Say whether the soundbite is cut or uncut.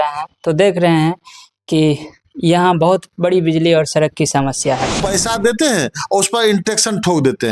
cut